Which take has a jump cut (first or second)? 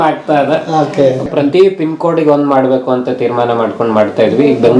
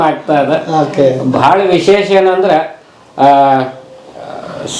first